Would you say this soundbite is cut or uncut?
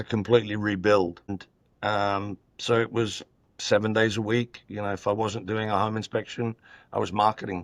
cut